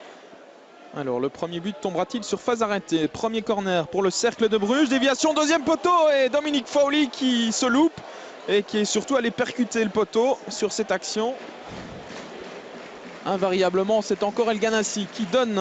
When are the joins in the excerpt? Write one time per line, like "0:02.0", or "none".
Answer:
none